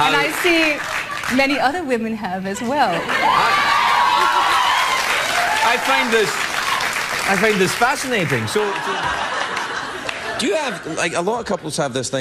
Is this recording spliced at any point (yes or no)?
yes